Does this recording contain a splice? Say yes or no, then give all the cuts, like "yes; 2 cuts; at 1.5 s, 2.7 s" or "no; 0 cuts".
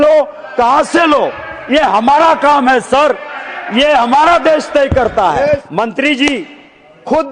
yes; 1 cut; at 5.7 s